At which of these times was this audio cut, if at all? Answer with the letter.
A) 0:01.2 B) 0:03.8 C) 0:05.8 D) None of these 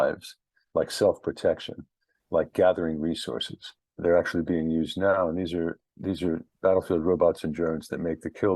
B